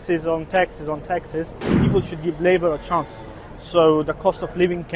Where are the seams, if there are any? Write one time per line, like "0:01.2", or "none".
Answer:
0:01.8